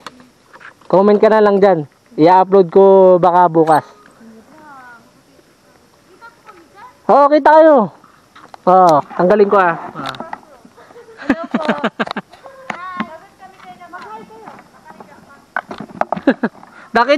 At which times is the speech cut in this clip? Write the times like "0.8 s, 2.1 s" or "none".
none